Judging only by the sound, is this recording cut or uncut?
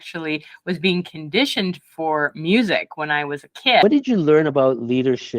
cut